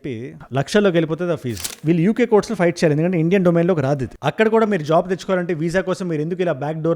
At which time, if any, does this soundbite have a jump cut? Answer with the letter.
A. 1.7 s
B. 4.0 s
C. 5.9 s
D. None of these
A